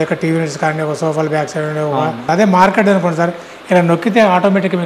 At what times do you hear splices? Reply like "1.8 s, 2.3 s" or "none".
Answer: 2.3 s